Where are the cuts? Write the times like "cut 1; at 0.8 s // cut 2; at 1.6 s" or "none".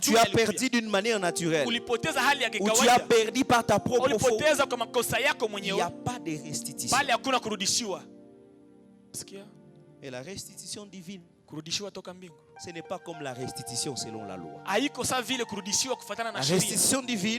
cut 1; at 9.2 s